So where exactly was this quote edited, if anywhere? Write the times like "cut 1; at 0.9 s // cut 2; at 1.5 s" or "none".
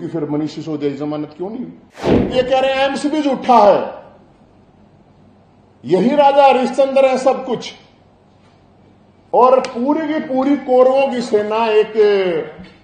cut 1; at 2.3 s